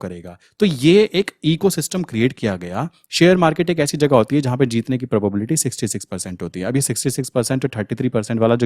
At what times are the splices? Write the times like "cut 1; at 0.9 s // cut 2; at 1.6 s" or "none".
cut 1; at 3.0 s